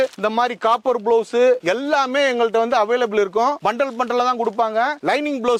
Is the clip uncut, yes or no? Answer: yes